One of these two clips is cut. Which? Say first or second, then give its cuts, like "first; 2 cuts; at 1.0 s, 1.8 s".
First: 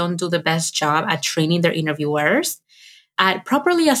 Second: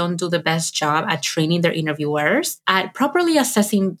second; 1 cut; at 2.6 s